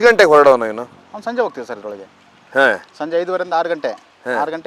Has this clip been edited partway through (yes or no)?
no